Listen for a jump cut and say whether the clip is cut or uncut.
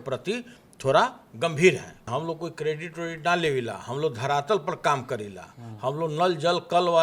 cut